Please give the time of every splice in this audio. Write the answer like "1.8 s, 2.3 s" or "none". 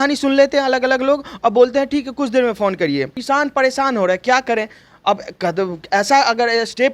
3.2 s